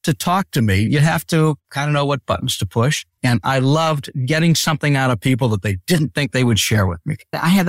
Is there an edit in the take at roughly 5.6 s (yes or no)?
no